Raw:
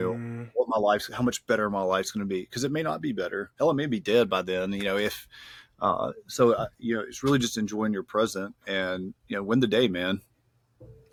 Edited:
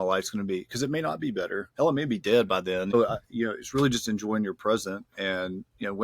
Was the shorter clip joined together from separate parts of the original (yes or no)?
yes